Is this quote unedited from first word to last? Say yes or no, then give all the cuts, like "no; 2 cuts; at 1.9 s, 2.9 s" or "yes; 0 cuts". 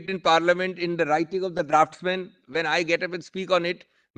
yes; 0 cuts